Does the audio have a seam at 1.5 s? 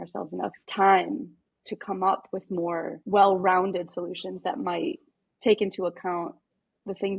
no; 1 cut; at 3.0 s

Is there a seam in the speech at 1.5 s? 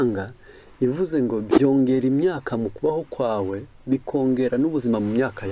yes; 1 cut; at 1.5 s

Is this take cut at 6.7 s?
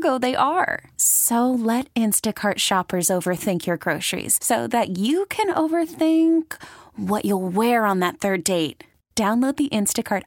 no; 0 cuts

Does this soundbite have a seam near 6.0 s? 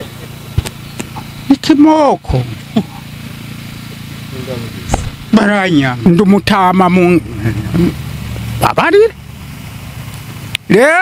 yes; 1 cut; at 6.0 s

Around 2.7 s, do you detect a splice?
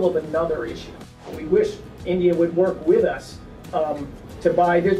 no; 1 cut; at 1.3 s

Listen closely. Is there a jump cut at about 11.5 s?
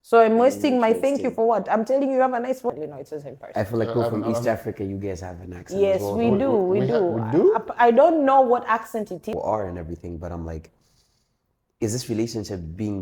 no; 2 cuts; at 2.7 s, 9.3 s

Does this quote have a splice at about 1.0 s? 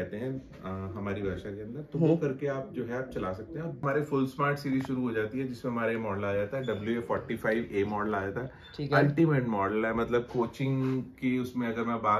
no; 1 cut; at 3.8 s

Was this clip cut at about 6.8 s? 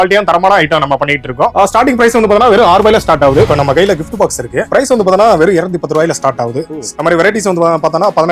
yes; 4 cuts; at 1.5 s, 3.5 s, 4.7 s, 6.8 s

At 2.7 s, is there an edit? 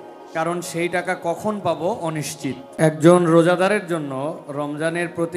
yes; 1 cut; at 2.7 s

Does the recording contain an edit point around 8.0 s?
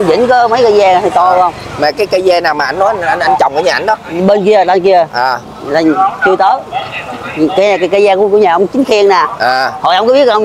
no; 0 cuts

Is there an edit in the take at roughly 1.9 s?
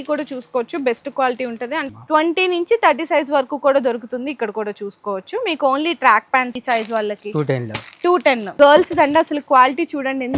yes; 3 cuts; at 1.9 s, 6.6 s, 8.5 s

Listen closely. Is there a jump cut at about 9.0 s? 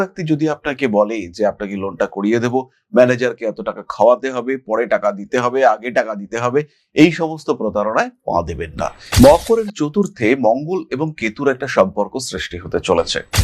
yes; 1 cut; at 9.0 s

